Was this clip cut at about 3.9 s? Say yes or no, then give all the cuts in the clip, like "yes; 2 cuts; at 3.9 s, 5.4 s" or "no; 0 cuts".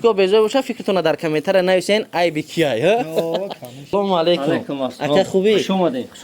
yes; 1 cut; at 3.9 s